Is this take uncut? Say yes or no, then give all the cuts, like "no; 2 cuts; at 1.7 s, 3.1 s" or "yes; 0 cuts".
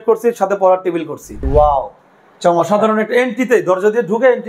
no; 1 cut; at 1.4 s